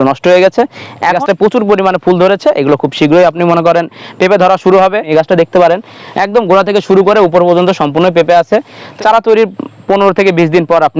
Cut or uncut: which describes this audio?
cut